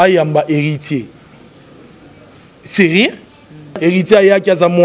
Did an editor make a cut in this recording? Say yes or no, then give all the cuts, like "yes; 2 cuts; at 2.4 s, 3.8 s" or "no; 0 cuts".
yes; 1 cut; at 3.8 s